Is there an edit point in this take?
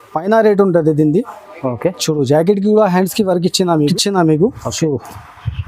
yes; 1 cut; at 3.9 s

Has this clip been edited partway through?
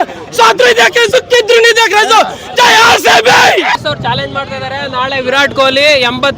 yes; 1 cut; at 3.7 s

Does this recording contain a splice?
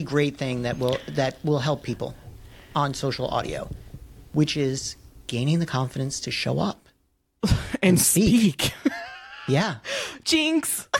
no; 0 cuts

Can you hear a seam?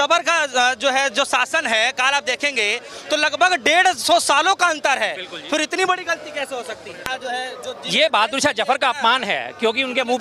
yes; 1 cut; at 7.1 s

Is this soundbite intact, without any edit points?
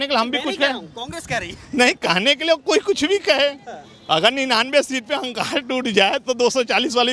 yes; 0 cuts

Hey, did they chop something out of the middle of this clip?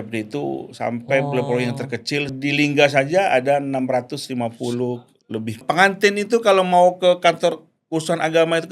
yes; 2 cuts; at 2.3 s, 5.6 s

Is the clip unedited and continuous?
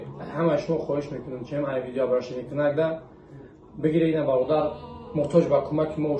yes; 0 cuts

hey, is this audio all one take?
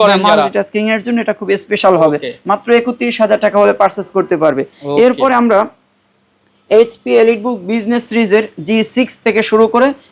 yes; 0 cuts

